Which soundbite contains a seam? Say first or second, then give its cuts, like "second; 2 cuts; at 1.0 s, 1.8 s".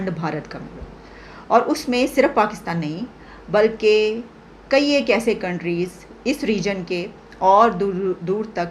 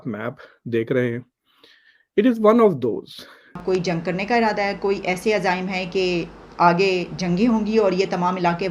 second; 1 cut; at 3.6 s